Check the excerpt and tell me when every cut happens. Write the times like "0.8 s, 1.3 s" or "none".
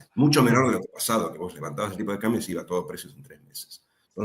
0.9 s